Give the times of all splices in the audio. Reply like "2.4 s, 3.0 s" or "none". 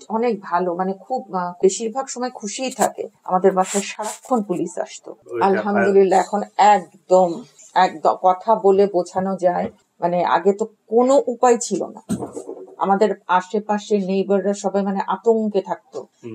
3.2 s, 5.2 s